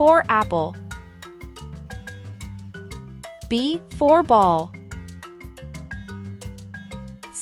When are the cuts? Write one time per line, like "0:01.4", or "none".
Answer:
none